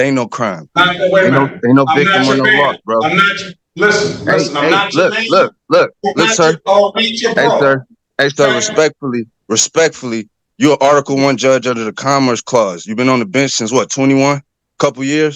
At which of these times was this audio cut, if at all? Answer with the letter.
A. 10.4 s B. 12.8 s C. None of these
C